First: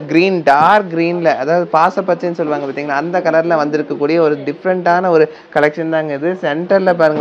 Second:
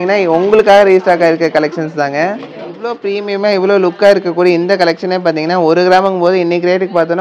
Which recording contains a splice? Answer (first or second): second